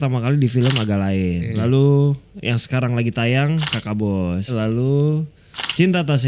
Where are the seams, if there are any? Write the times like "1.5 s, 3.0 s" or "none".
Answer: 1.5 s, 4.5 s